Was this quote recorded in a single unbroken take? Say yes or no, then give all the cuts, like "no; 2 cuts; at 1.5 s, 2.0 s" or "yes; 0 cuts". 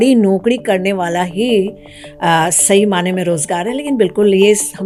yes; 0 cuts